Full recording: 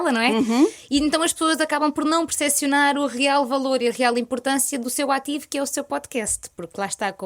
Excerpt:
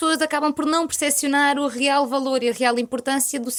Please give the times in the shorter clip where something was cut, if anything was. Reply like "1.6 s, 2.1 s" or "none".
none